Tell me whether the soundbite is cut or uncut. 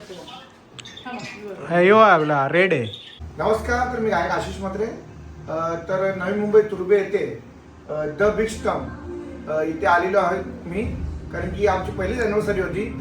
cut